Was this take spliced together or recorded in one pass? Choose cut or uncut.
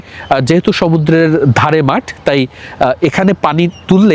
uncut